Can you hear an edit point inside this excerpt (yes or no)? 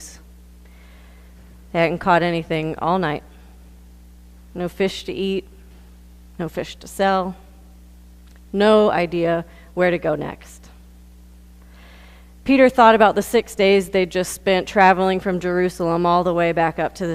yes